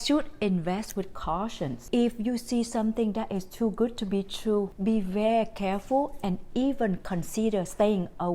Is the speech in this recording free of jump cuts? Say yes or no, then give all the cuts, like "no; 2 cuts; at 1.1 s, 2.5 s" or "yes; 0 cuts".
no; 2 cuts; at 1.8 s, 4.7 s